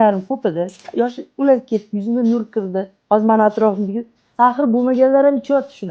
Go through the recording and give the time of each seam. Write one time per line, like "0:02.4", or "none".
0:02.9